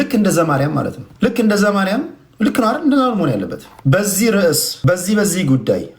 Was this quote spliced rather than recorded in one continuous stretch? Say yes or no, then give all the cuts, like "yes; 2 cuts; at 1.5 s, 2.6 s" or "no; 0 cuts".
yes; 3 cuts; at 1.0 s, 3.6 s, 4.7 s